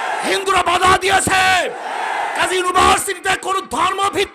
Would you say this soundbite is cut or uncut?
uncut